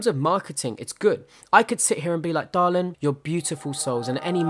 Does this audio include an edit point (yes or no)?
yes